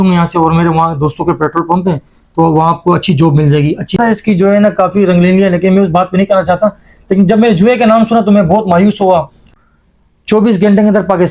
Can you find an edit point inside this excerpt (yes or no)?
yes